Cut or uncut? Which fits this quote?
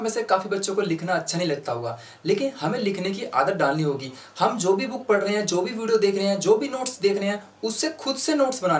uncut